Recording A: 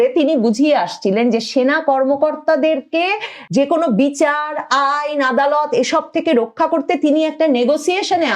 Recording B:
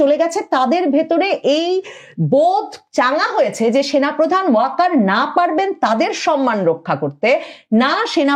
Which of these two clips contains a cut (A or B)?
A